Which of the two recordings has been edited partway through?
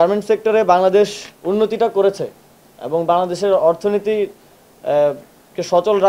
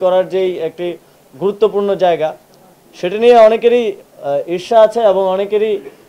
first; 1 cut; at 1.3 s

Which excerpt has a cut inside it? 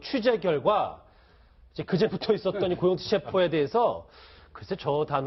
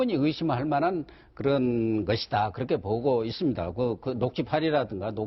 second; 1 cut; at 2.8 s

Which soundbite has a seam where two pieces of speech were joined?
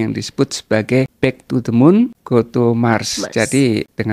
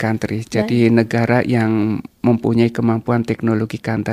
first; 2 cuts; at 1.1 s, 2.2 s

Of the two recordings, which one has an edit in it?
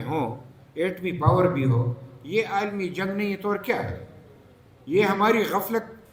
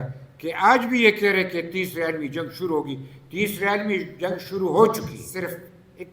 second; 1 cut; at 5.2 s

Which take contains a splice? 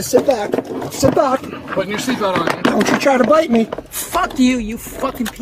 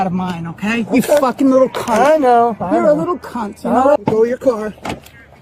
second; 1 cut; at 4.0 s

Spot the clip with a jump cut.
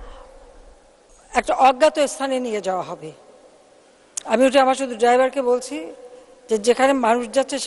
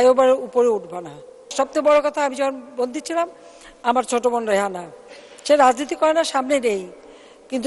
second; 1 cut; at 1.5 s

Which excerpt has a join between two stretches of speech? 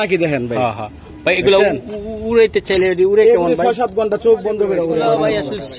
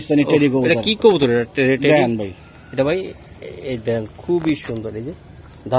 first; 1 cut; at 4.9 s

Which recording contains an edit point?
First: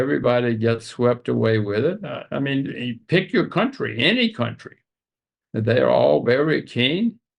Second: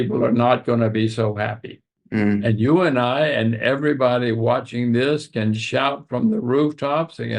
second; 1 cut; at 2.0 s

